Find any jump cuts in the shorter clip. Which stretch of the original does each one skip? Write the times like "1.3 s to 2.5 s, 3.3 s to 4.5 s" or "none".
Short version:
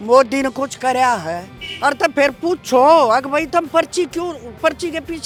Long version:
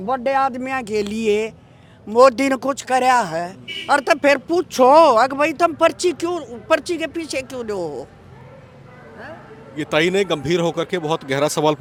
none